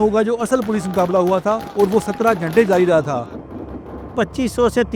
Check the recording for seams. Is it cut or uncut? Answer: cut